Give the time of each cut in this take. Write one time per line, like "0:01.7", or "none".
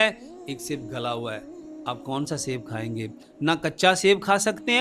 none